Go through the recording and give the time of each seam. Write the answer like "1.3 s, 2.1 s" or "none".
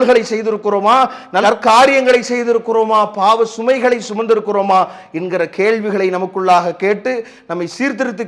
none

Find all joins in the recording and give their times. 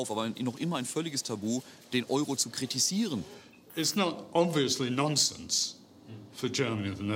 3.3 s

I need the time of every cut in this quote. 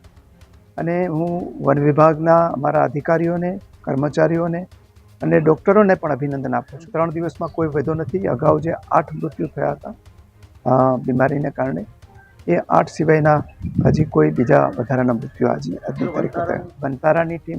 6.9 s, 16.7 s

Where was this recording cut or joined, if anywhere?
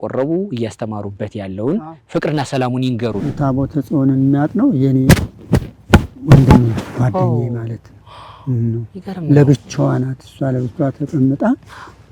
3.2 s

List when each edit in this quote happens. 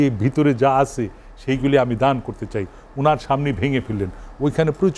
none

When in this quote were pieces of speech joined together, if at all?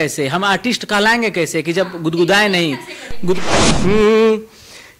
3.4 s

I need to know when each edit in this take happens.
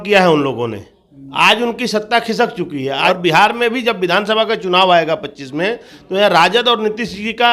3.1 s

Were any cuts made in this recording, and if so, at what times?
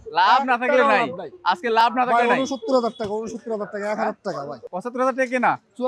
4.5 s

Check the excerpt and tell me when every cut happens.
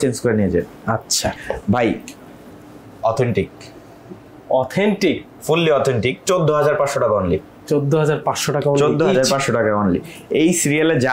1.3 s

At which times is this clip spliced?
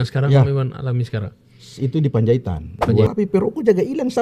3.1 s

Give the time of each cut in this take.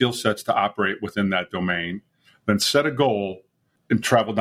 none

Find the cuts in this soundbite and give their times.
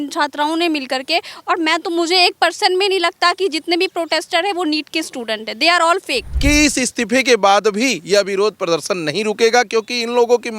6.3 s

